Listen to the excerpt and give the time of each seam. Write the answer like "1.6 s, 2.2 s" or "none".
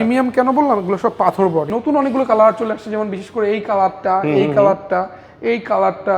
1.7 s